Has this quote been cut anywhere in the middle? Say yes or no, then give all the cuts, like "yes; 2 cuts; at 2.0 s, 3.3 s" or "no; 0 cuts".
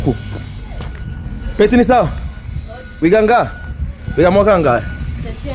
no; 0 cuts